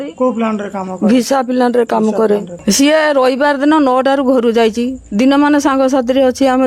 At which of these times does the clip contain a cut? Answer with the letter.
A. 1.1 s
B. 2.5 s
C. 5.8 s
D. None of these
B